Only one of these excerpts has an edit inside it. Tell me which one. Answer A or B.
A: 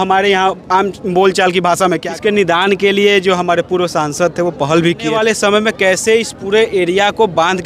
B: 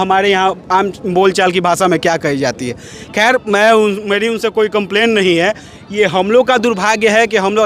A